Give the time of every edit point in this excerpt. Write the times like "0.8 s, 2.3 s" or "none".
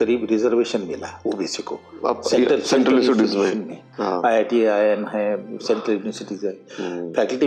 none